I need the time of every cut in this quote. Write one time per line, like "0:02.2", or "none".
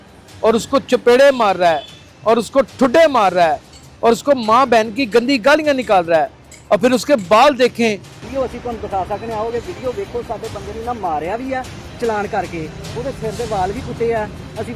0:08.1